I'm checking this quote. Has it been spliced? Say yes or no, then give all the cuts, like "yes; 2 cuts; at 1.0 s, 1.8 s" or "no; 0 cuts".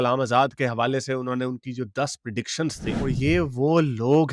yes; 1 cut; at 2.9 s